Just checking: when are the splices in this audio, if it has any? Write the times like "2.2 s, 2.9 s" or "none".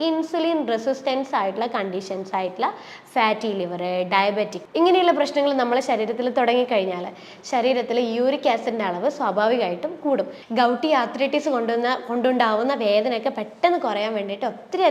10.4 s

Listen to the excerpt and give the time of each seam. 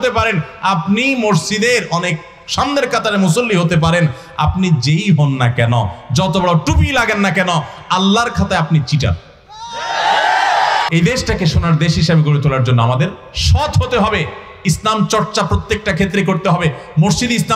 10.9 s

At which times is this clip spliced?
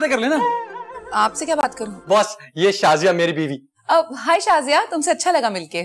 1.9 s

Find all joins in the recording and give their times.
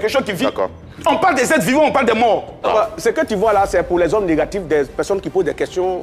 2.6 s

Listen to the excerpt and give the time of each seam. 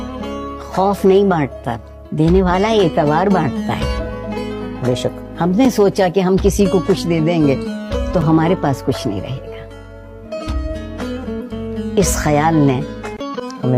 none

